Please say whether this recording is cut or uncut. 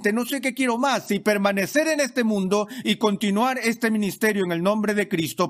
uncut